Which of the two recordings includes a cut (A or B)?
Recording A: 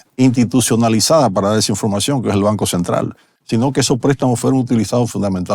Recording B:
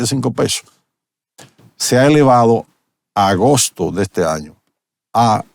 A